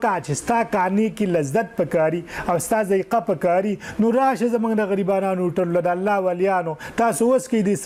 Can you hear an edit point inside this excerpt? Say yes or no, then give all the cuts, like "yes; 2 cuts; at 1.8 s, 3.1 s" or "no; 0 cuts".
no; 0 cuts